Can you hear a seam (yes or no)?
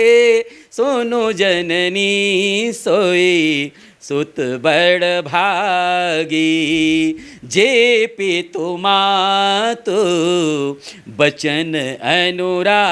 no